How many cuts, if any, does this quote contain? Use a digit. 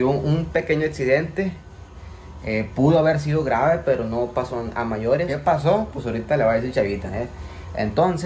1